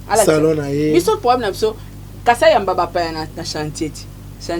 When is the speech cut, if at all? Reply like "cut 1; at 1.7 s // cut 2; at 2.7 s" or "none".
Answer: none